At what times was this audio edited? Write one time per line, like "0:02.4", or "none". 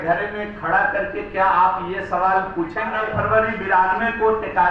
0:03.0